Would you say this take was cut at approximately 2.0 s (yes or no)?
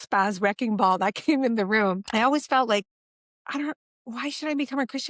yes